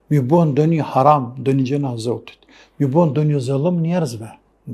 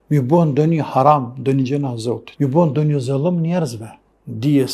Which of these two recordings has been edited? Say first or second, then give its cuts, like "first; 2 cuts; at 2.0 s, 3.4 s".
second; 1 cut; at 2.3 s